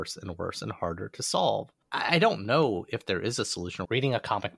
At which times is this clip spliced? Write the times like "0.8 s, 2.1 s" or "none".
1.8 s, 3.8 s

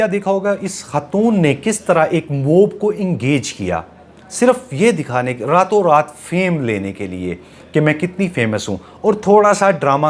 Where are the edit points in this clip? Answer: none

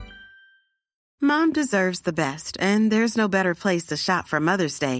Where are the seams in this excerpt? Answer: 1.0 s

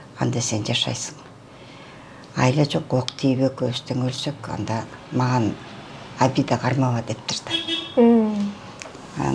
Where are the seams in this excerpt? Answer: none

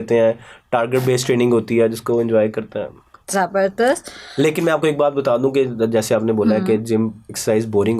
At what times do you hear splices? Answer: none

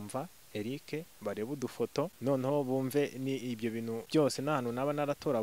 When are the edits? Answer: 2.1 s, 4.0 s

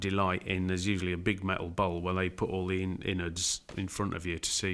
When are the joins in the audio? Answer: none

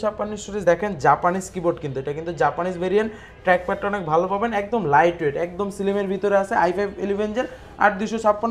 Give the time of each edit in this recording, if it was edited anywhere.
none

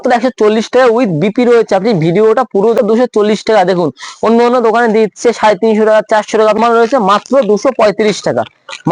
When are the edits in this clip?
2.8 s, 6.6 s

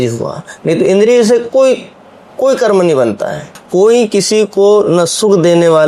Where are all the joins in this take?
3.6 s

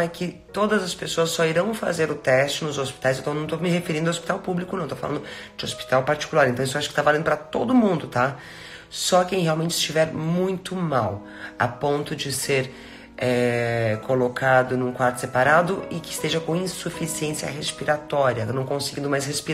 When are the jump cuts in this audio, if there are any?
none

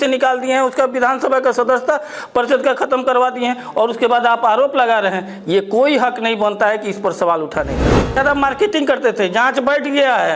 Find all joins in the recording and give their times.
8.2 s

